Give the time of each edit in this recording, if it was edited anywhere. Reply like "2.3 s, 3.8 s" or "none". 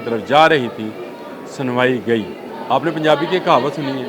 2.5 s